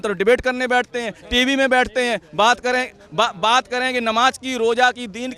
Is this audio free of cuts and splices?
yes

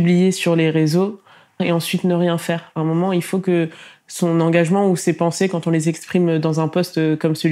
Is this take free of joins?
no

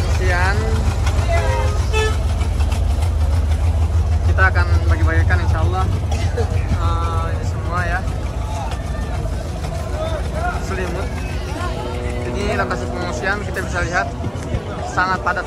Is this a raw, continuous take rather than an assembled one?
yes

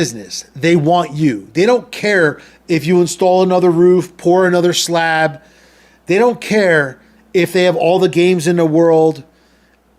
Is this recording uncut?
yes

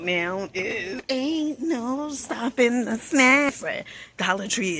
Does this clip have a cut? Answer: yes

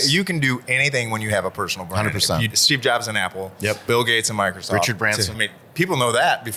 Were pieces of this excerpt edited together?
yes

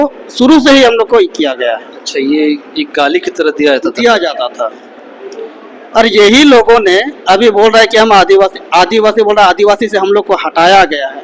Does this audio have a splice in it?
no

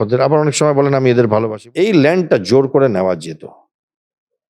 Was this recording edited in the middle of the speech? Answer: yes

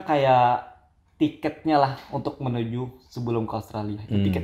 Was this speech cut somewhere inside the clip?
no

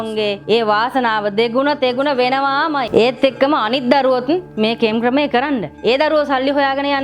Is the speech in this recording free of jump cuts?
no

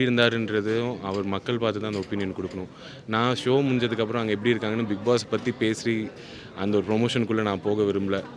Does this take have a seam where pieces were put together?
no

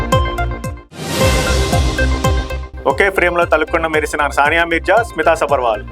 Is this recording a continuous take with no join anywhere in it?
yes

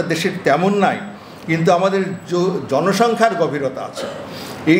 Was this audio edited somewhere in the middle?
no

